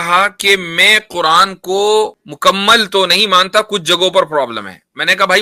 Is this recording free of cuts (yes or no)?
no